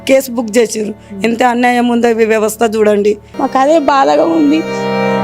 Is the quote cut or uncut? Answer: cut